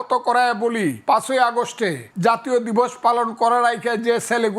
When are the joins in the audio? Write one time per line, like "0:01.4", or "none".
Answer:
0:01.0
0:02.0